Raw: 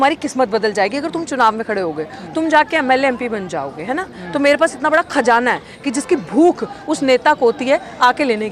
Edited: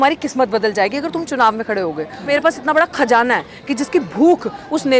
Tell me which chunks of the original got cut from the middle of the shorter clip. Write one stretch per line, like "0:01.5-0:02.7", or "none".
0:02.3-0:04.4